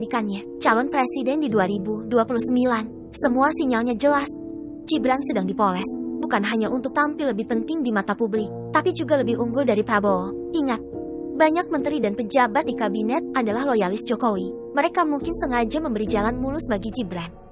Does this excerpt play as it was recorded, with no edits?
yes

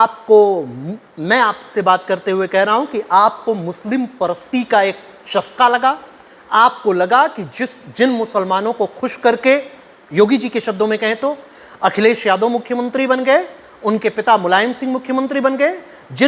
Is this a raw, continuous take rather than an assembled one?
yes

